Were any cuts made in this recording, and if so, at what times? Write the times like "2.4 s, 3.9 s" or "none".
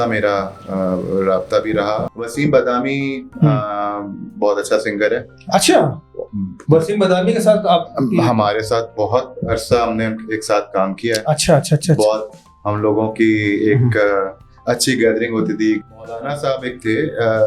2.1 s, 15.8 s